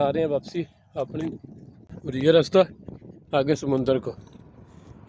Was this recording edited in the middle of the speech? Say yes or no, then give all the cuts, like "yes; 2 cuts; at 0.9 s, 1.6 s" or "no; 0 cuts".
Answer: yes; 1 cut; at 1.8 s